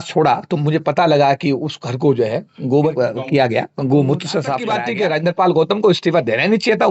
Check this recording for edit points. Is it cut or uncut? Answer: cut